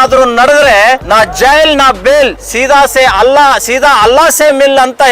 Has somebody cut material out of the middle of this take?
yes; 2 cuts; at 1.0 s, 2.5 s

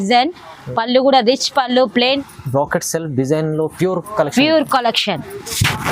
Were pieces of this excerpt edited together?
yes; 1 cut; at 2.2 s

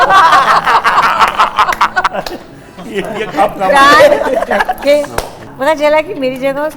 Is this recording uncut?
no; 1 cut; at 5.5 s

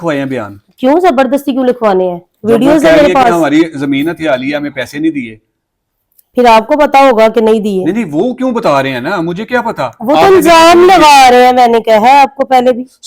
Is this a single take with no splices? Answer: yes; 0 cuts

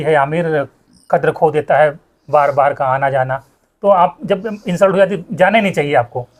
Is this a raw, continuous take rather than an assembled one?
yes; 0 cuts

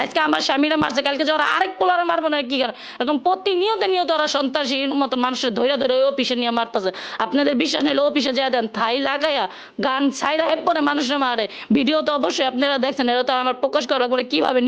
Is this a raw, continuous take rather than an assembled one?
yes; 0 cuts

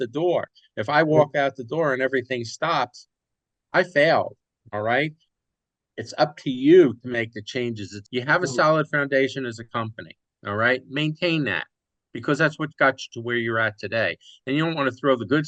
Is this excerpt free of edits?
no; 1 cut; at 7.9 s

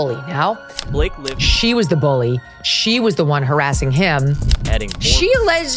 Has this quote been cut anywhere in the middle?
yes; 2 cuts; at 0.9 s, 4.6 s

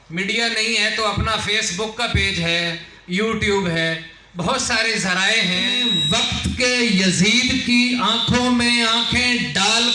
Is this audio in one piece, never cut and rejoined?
no; 1 cut; at 5.8 s

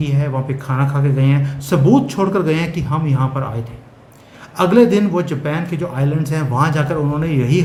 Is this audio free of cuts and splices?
yes; 0 cuts

